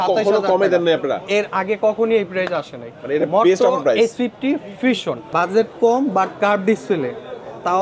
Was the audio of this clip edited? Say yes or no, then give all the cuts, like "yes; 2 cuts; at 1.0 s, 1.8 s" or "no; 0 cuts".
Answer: yes; 1 cut; at 5.2 s